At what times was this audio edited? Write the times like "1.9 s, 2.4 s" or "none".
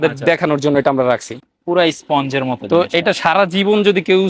1.4 s